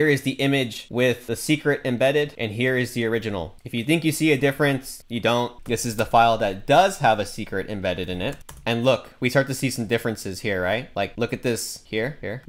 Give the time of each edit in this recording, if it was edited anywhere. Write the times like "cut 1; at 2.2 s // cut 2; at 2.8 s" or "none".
cut 1; at 5.6 s // cut 2; at 8.4 s